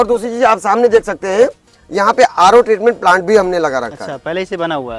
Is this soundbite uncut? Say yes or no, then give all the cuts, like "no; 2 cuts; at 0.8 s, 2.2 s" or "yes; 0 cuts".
yes; 0 cuts